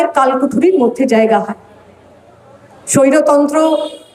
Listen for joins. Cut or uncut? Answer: uncut